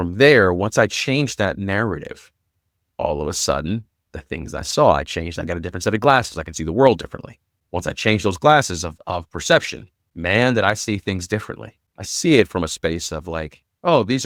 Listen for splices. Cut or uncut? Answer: uncut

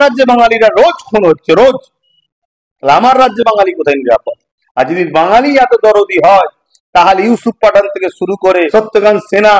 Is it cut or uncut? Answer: cut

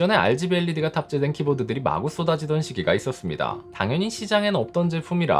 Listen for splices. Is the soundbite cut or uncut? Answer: cut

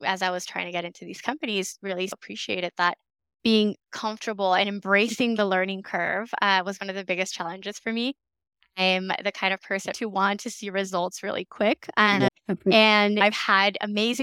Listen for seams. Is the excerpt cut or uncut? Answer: cut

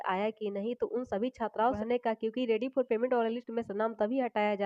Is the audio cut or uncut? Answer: cut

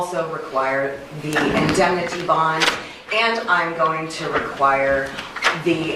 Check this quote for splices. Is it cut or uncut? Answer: uncut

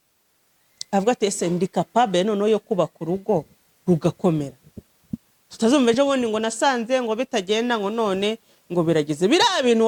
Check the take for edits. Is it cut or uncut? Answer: uncut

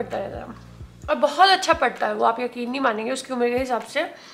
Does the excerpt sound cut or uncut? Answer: uncut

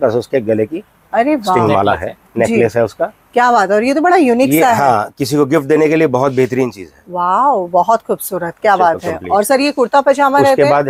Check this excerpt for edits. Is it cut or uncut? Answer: uncut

